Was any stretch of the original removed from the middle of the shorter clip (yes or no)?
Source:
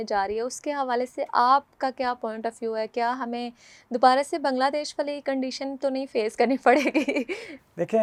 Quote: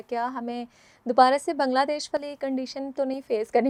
no